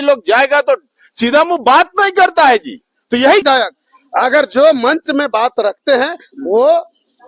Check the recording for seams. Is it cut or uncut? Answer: cut